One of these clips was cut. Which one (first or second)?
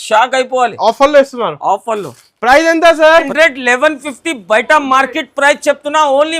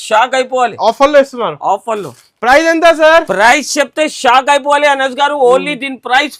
first